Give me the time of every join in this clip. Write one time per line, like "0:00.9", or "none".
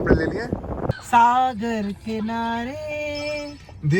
0:01.0